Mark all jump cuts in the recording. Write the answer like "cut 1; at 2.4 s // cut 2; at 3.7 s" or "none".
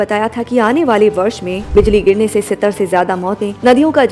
cut 1; at 1.6 s